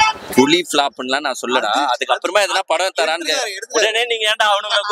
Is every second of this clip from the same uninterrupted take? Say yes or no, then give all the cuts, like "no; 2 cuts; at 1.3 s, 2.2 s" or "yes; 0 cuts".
yes; 0 cuts